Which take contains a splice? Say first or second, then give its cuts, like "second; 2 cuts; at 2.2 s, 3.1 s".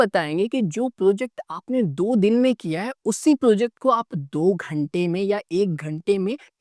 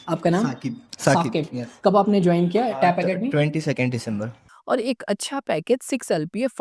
second; 1 cut; at 4.4 s